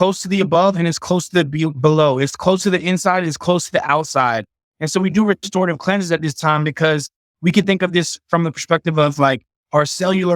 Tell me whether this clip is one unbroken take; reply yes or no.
yes